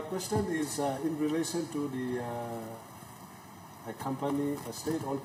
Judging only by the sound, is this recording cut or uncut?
uncut